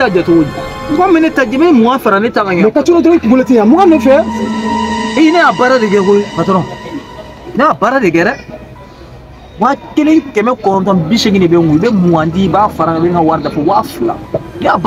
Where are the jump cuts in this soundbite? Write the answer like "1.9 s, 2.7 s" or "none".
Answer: none